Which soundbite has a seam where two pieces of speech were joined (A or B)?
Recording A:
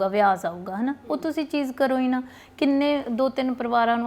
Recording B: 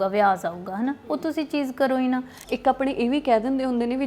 B